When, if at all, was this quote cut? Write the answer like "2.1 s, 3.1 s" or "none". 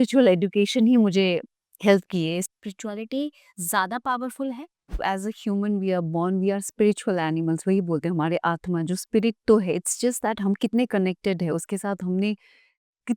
2.4 s, 5.0 s